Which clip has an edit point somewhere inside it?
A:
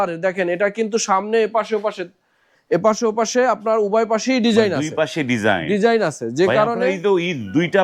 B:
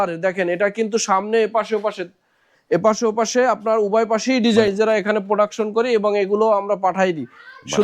B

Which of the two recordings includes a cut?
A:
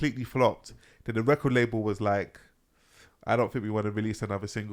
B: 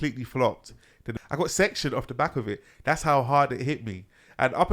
B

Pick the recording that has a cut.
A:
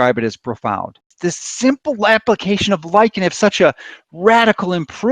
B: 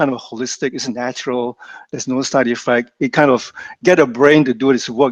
A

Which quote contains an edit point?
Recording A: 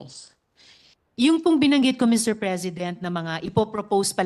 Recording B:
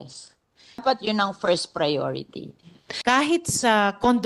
B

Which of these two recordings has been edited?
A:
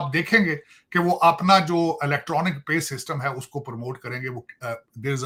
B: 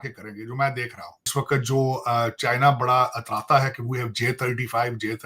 B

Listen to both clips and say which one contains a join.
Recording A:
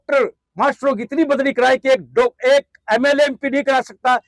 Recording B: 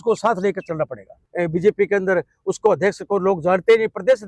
B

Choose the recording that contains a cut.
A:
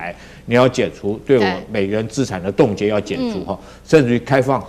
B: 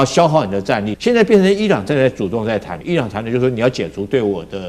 B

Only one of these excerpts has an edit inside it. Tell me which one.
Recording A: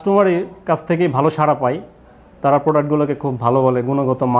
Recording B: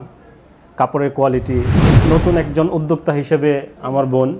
B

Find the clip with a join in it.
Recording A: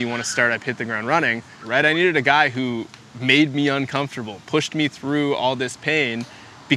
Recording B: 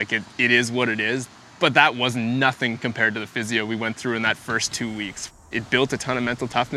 B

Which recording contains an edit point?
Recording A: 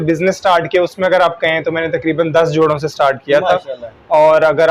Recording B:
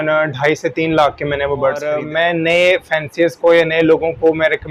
B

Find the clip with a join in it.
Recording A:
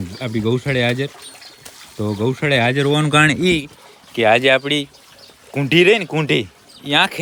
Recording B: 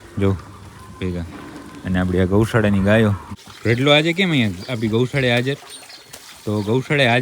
B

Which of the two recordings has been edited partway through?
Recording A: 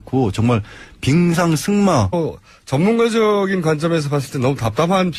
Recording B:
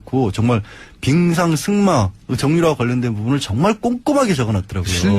B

